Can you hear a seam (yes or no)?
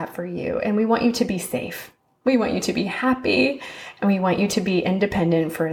no